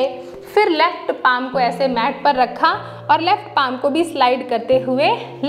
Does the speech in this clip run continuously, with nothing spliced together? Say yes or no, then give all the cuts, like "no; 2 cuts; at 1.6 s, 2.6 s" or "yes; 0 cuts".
yes; 0 cuts